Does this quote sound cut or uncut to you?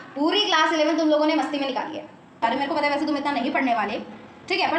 cut